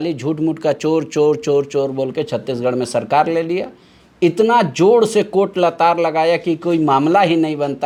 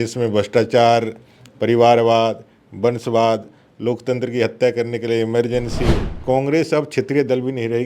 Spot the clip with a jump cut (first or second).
second